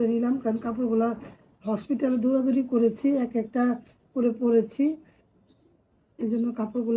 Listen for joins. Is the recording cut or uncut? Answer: uncut